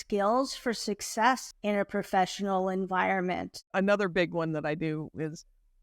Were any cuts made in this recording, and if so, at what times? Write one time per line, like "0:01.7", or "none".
0:01.5
0:03.6